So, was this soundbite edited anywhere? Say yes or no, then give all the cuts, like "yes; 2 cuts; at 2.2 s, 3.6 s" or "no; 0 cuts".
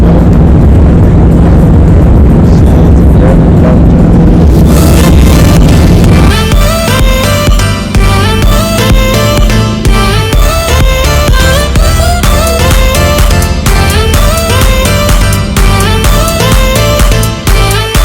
yes; 1 cut; at 6.3 s